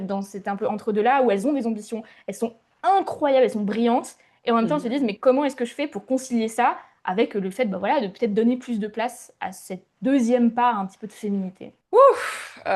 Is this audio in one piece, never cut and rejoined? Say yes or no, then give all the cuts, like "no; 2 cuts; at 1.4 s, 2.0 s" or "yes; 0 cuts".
yes; 0 cuts